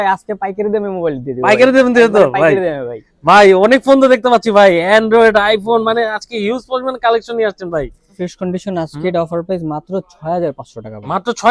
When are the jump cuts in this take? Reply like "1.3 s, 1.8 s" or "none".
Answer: 8.2 s